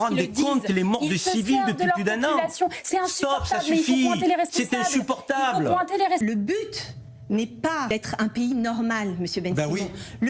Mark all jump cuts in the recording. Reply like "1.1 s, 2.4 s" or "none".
6.2 s, 7.9 s